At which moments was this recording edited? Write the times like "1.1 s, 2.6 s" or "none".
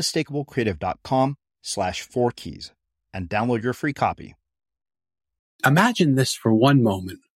5.6 s